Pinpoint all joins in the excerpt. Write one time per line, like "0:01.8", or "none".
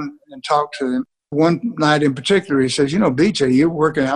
0:01.3